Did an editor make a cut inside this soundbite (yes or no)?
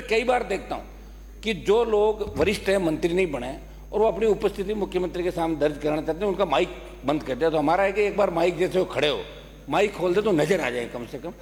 no